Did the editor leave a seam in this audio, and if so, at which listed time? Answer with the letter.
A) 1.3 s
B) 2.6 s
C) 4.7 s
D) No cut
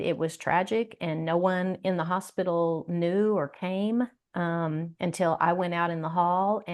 D